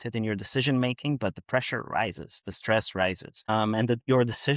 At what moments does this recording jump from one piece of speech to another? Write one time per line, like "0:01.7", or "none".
0:03.4